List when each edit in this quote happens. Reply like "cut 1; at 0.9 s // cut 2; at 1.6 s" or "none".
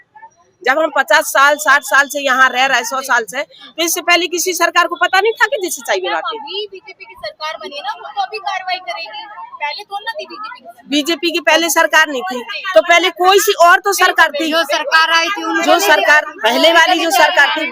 none